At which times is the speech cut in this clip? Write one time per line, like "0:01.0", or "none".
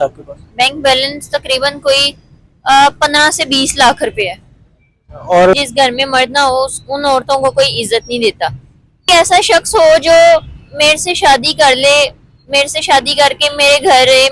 0:05.5
0:09.1